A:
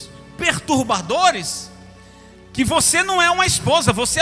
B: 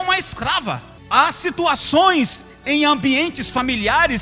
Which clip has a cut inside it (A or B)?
B